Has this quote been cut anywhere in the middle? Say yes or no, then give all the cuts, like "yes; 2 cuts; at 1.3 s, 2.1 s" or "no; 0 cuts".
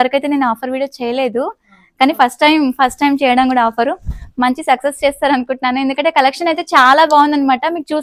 no; 0 cuts